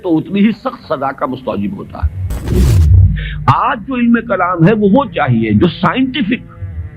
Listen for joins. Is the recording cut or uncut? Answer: cut